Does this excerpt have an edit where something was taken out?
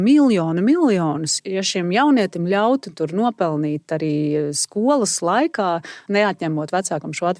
yes; 2 cuts; at 1.4 s, 6.0 s

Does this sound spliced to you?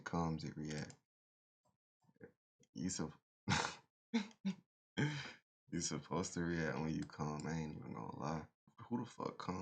no; 0 cuts

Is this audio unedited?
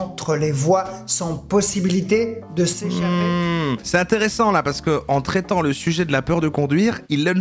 yes; 0 cuts

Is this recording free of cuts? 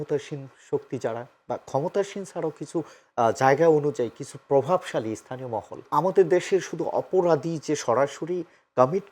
no; 1 cut; at 5.9 s

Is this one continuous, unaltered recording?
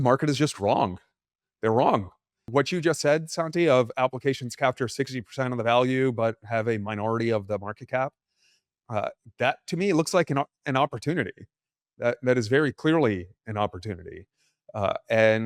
no; 1 cut; at 2.4 s

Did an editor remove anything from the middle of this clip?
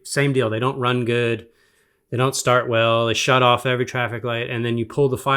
no; 0 cuts

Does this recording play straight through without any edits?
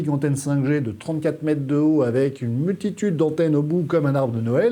yes; 0 cuts

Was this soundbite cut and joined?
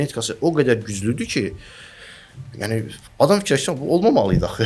no; 0 cuts

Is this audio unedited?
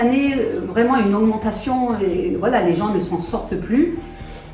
yes; 0 cuts

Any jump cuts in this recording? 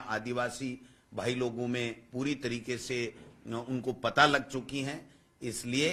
no; 0 cuts

